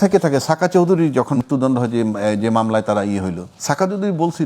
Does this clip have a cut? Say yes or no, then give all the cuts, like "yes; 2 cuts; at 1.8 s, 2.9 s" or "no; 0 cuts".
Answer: yes; 2 cuts; at 1.4 s, 3.5 s